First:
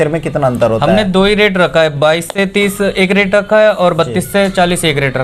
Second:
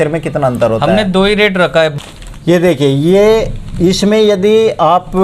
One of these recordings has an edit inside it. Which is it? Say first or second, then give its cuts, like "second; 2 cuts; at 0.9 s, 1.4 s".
second; 1 cut; at 1.9 s